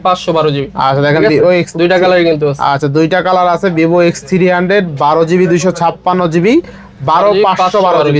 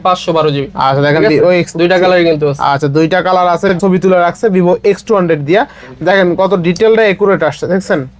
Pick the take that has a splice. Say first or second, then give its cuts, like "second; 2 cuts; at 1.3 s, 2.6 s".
second; 1 cut; at 3.8 s